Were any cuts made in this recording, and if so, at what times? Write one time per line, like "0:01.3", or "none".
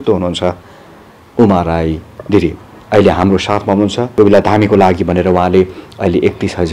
0:04.1